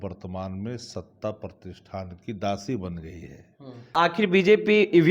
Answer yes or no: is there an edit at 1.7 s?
no